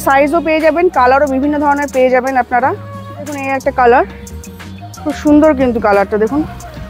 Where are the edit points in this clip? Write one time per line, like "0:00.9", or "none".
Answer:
0:03.4